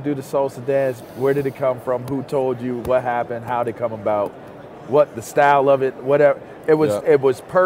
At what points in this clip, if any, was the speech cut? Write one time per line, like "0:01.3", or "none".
none